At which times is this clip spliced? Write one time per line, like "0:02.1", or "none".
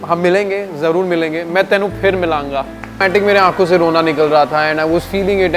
0:03.0